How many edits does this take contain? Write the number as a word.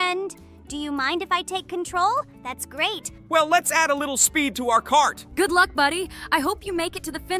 two